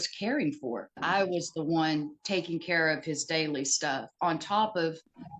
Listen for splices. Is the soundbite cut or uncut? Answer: cut